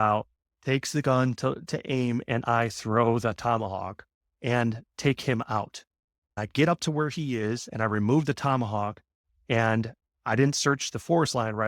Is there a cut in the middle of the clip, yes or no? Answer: yes